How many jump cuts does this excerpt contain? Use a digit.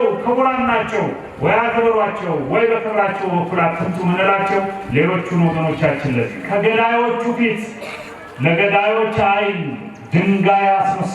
1